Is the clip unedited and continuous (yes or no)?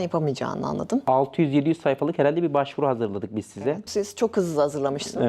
no